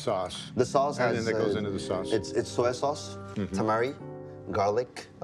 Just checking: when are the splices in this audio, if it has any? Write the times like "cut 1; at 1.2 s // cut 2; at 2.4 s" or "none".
none